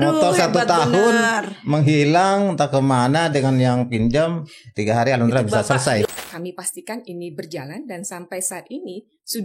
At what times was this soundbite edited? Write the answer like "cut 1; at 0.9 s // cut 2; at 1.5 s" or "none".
cut 1; at 6.1 s